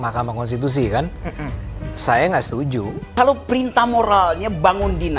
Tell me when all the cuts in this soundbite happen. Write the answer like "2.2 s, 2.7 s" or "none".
3.0 s